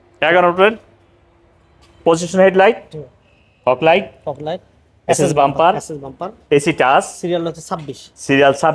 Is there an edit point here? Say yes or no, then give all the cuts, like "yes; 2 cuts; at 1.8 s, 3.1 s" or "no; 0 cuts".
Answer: no; 0 cuts